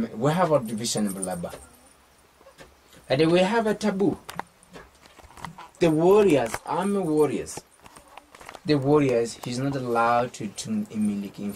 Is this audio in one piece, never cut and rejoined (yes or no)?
yes